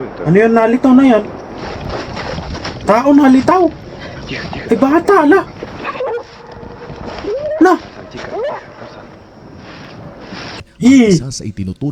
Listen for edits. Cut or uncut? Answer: cut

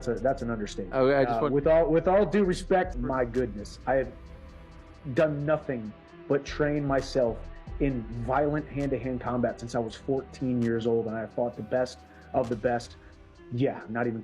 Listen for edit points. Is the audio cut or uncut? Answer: cut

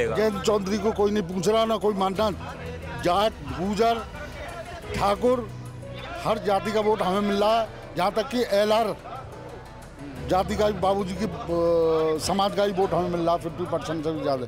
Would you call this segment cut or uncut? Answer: uncut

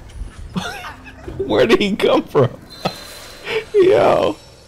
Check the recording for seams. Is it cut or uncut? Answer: uncut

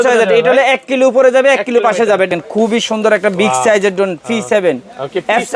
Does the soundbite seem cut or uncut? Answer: cut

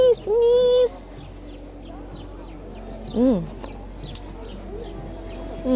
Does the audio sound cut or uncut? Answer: uncut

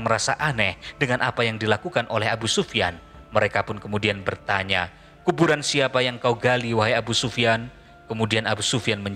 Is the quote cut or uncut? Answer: uncut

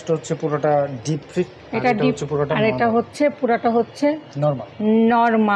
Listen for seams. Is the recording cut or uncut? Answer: uncut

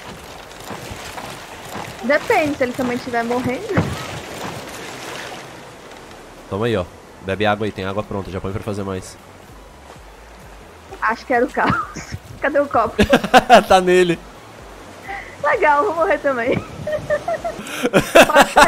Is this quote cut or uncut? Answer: cut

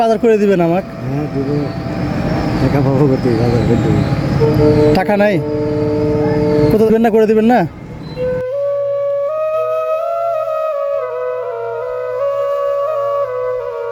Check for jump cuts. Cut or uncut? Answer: uncut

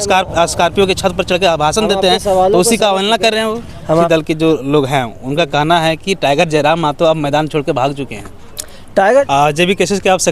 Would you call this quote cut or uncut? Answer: cut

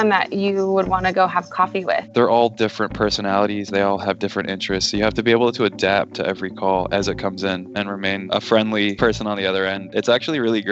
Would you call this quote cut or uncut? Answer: cut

